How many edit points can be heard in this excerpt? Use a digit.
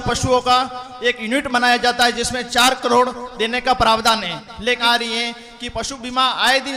1